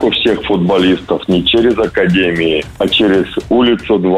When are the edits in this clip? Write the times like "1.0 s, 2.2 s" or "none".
2.7 s